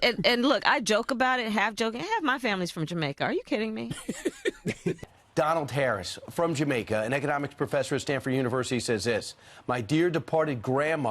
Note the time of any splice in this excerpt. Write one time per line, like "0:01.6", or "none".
0:05.0